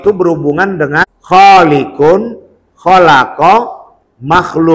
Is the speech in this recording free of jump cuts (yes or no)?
no